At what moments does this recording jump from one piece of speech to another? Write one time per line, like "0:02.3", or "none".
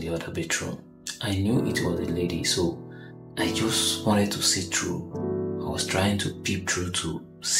0:01.1